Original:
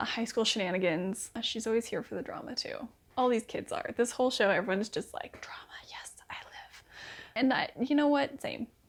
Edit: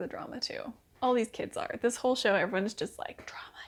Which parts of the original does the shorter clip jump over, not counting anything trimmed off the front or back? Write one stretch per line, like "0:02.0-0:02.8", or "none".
none